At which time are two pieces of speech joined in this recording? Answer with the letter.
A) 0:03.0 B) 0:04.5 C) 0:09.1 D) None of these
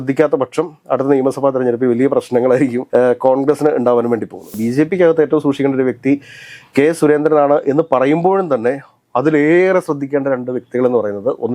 B